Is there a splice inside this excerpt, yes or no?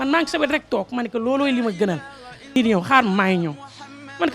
yes